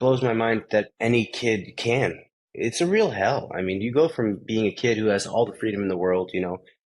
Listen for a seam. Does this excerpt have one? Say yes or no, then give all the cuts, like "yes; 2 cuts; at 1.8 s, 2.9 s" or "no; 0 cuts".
yes; 2 cuts; at 0.9 s, 2.3 s